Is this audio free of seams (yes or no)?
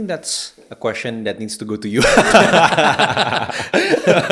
yes